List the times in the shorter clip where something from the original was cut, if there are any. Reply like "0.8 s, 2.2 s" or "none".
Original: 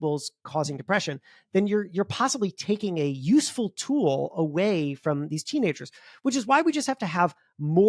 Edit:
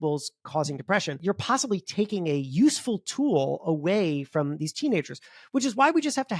1.2 s

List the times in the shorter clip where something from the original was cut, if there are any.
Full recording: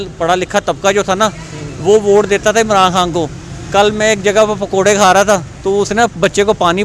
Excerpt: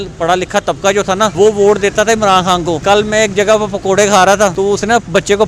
1.3 s, 2.8 s, 4.5 s

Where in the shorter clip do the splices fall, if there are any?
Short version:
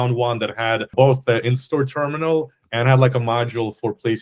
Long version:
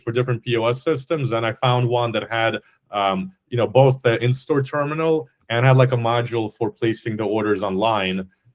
0.9 s

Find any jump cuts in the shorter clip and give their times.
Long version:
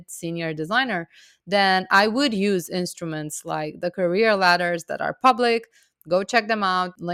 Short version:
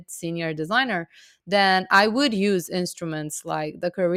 none

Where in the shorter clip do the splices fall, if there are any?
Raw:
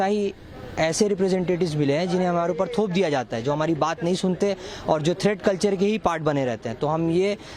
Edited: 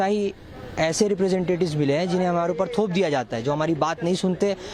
none

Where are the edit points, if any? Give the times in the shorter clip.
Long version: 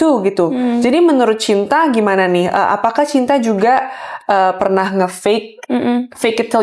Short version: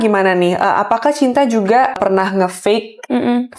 2.0 s

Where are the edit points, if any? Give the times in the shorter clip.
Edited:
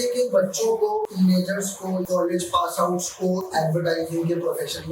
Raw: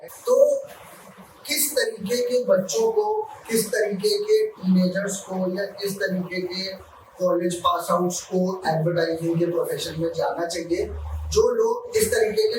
1.1 s, 2.1 s

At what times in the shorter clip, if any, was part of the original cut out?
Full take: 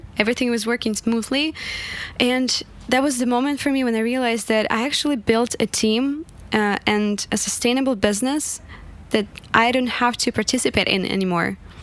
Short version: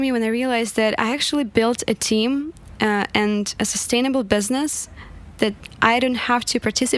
none

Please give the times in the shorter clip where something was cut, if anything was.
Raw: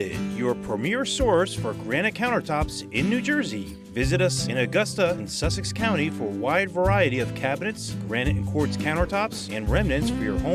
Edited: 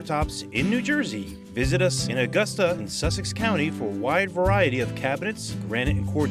none

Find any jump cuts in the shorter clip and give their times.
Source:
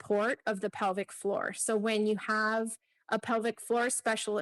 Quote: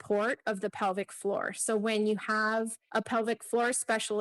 2.8 s

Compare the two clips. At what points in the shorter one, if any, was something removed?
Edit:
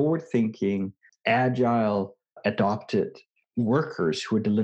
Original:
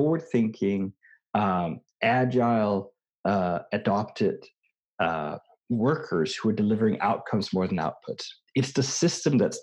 1.1 s, 2.4 s, 3.3 s

